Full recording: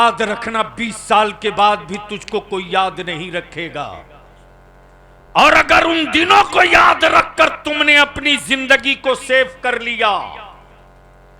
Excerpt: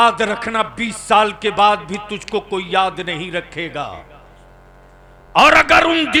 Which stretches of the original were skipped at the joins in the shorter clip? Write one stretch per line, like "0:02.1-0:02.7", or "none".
none